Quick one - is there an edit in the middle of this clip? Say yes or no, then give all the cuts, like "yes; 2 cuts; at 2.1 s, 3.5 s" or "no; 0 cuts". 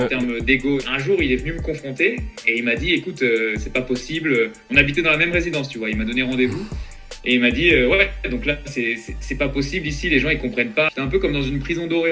yes; 2 cuts; at 0.9 s, 10.9 s